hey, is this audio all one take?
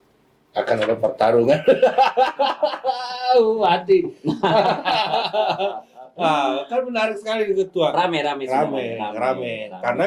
yes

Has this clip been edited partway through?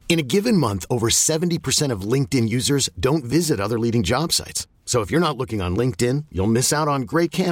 no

